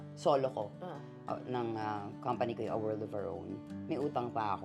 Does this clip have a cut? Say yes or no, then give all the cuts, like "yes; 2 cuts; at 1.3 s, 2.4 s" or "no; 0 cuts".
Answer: yes; 1 cut; at 3.7 s